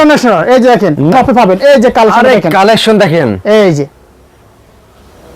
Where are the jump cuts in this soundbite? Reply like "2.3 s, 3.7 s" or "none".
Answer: 1.1 s